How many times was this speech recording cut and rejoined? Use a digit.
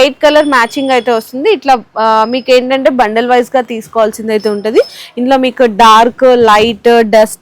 0